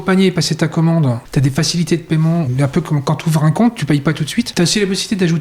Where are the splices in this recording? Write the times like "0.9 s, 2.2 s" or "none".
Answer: 1.2 s, 2.5 s, 4.5 s